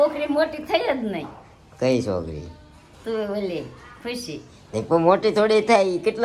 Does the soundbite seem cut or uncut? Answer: uncut